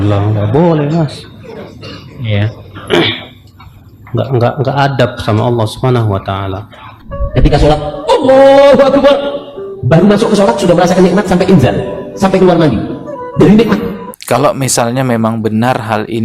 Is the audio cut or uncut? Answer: cut